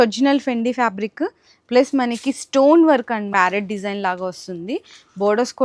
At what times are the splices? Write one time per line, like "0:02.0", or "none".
0:03.3